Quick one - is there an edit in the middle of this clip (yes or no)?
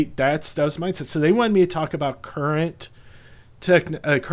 no